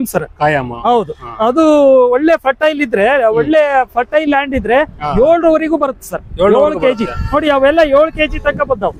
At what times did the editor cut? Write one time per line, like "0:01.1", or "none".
none

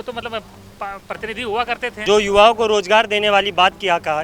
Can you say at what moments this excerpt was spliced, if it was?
0:02.0

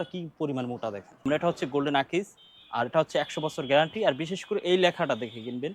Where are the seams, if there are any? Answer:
0:01.2

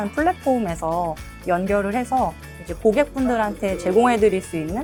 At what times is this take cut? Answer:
none

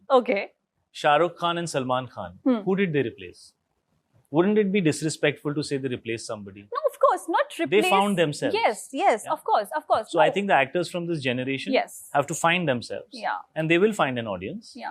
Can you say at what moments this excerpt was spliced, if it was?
none

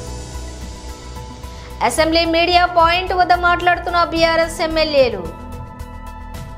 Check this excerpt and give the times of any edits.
0:00.9

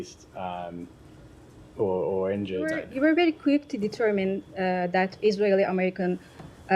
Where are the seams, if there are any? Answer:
0:02.8

